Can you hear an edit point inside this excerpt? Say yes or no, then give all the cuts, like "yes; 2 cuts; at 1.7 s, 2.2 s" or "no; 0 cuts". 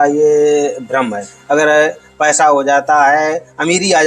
yes; 1 cut; at 1.3 s